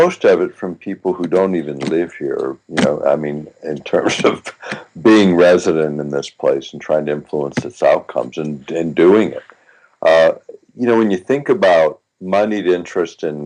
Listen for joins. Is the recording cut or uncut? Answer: uncut